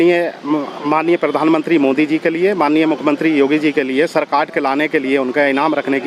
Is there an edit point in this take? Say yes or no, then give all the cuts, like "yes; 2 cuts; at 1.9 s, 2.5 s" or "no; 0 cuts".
no; 0 cuts